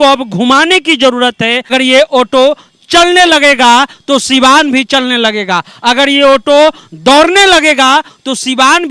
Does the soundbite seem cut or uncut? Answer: cut